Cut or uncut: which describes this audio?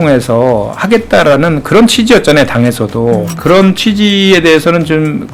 cut